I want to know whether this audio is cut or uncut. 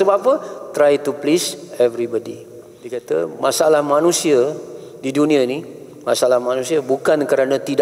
cut